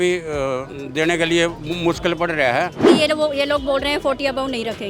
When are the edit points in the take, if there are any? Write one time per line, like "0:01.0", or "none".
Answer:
0:02.8